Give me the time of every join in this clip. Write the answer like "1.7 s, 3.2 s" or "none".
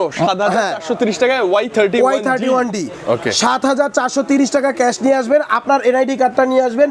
none